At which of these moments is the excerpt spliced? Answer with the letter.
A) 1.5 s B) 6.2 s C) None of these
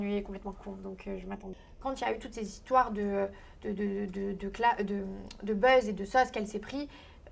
A